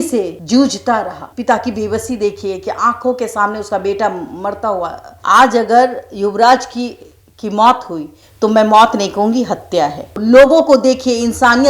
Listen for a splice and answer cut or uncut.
cut